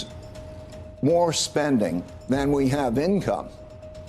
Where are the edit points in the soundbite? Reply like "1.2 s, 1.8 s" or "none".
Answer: 2.1 s